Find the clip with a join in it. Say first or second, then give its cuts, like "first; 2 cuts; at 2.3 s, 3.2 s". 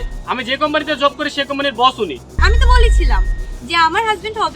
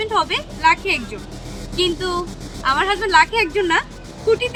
first; 1 cut; at 2.4 s